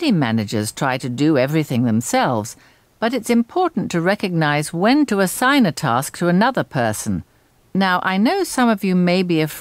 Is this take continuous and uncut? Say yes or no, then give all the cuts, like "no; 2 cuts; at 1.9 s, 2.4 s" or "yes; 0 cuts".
no; 2 cuts; at 2.4 s, 7.3 s